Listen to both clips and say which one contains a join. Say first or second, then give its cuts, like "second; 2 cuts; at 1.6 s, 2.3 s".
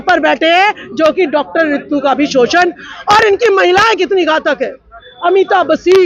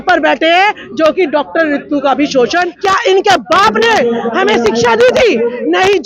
second; 1 cut; at 2.7 s